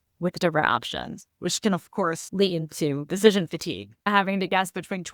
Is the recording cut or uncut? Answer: cut